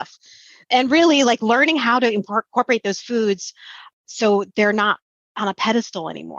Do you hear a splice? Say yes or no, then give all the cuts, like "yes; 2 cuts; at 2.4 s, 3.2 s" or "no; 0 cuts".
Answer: no; 0 cuts